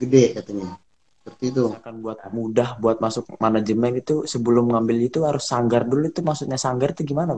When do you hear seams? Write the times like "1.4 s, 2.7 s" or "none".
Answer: 2.2 s